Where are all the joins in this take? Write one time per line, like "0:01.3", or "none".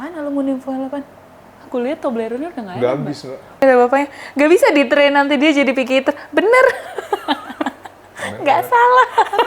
0:03.6